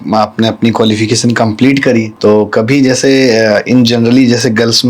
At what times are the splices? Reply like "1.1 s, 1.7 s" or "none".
2.1 s